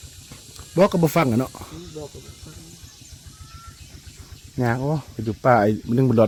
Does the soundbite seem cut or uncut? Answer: uncut